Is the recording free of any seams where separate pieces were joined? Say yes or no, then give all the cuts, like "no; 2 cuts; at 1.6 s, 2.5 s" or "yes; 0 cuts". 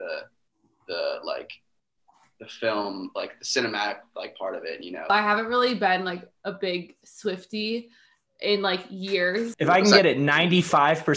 no; 2 cuts; at 5.1 s, 9.5 s